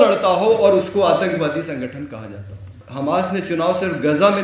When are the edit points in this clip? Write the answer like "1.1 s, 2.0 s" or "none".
2.8 s